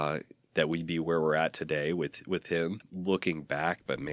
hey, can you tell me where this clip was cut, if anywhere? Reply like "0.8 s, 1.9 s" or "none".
2.9 s